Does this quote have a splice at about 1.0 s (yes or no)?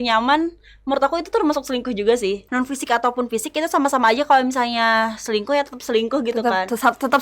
no